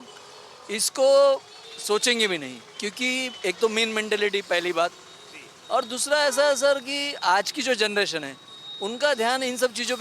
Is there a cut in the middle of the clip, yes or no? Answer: no